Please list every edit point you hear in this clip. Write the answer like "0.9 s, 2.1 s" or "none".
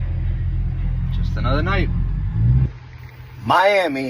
2.7 s